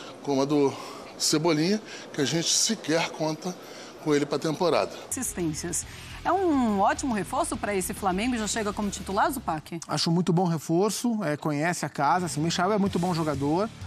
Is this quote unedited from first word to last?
no; 1 cut; at 5.1 s

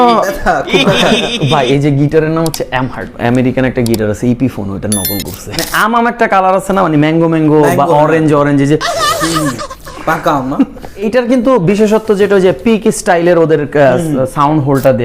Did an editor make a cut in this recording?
yes; 3 cuts; at 3.1 s, 5.7 s, 11.1 s

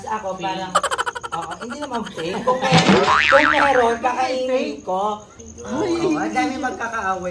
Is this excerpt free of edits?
no; 1 cut; at 5.3 s

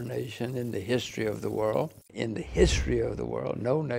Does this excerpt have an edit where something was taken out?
yes; 1 cut; at 2.0 s

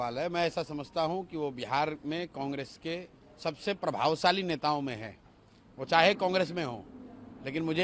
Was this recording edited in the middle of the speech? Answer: no; 0 cuts

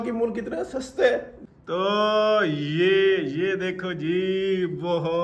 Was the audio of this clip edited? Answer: yes; 1 cut; at 1.3 s

